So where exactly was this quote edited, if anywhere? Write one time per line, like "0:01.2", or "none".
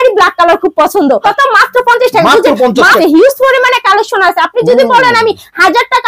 0:01.2
0:03.0